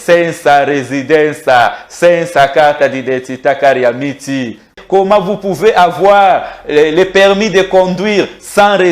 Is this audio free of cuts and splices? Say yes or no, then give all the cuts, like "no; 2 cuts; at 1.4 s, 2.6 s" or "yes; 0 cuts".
no; 1 cut; at 4.8 s